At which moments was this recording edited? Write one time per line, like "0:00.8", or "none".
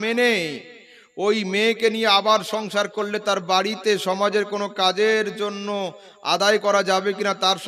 none